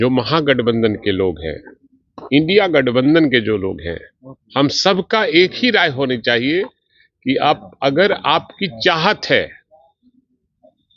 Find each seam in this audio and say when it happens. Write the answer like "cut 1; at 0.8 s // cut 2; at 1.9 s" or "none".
none